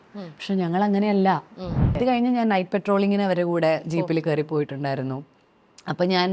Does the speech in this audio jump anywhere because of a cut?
yes; 1 cut; at 2.0 s

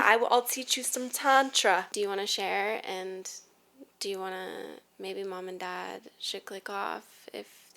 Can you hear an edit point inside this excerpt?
yes; 1 cut; at 1.9 s

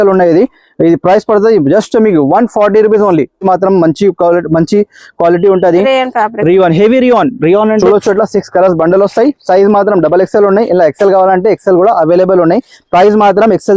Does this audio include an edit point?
yes; 2 cuts; at 3.4 s, 7.8 s

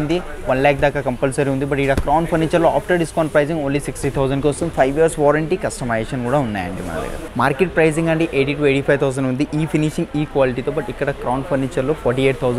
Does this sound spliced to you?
yes; 1 cut; at 7.2 s

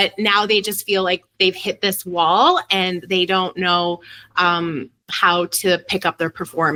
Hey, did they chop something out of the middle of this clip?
no; 0 cuts

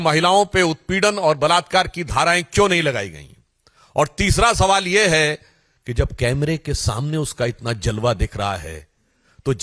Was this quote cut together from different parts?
no; 0 cuts

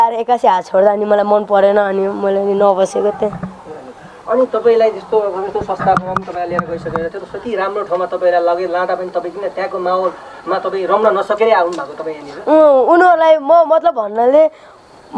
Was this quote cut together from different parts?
no; 0 cuts

